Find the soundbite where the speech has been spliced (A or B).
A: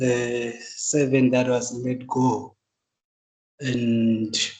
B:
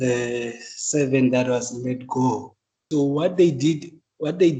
B